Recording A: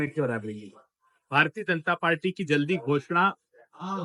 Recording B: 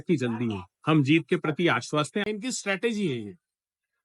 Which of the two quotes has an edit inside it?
B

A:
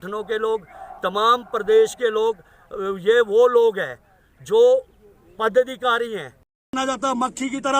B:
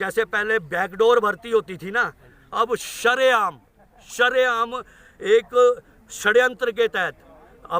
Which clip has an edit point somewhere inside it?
A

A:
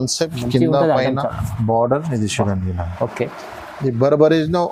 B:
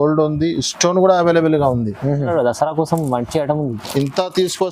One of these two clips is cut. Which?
B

